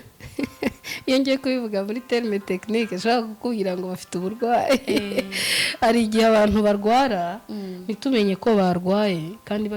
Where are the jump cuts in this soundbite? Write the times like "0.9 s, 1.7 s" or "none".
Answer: none